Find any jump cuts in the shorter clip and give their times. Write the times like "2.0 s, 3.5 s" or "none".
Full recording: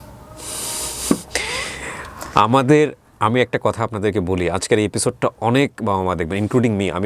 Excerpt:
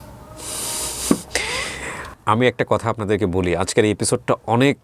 2.1 s

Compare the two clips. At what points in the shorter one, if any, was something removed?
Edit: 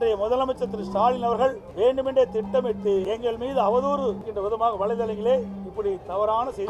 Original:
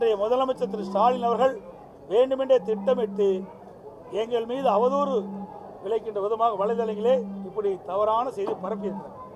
1.6 s, 3.1 s, 4.3 s

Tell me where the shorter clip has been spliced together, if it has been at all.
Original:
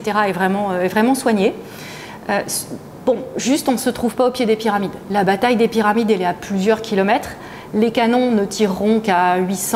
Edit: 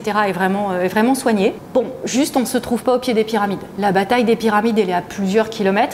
1.6 s

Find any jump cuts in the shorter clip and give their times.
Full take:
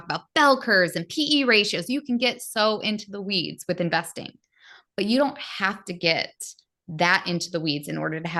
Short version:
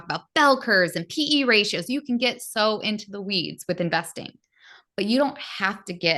none

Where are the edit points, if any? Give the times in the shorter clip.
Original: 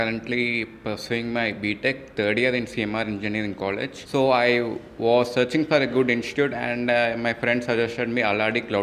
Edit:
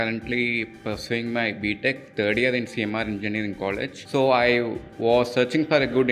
none

